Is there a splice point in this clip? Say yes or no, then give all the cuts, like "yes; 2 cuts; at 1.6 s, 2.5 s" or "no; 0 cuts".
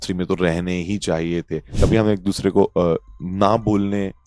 yes; 1 cut; at 1.7 s